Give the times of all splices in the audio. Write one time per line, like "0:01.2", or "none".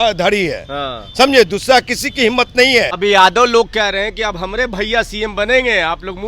0:02.9